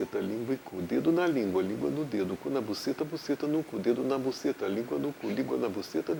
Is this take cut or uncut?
uncut